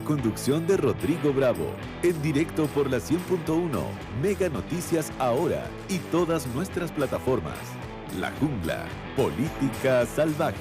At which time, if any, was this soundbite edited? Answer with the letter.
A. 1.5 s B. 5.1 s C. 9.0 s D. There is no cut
C